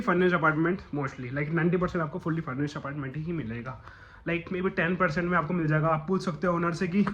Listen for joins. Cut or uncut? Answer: uncut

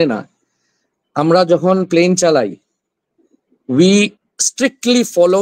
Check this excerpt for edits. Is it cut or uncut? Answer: uncut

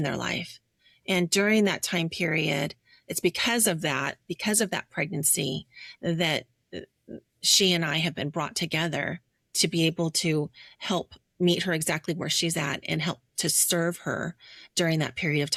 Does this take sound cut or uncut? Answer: uncut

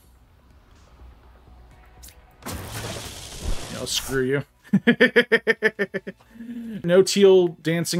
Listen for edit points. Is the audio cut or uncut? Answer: cut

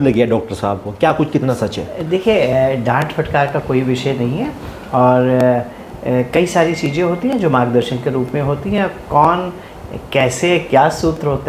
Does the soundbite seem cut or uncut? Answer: uncut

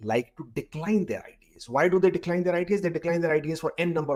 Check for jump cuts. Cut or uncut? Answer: uncut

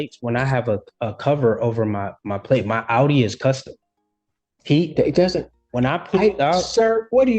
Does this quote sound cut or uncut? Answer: uncut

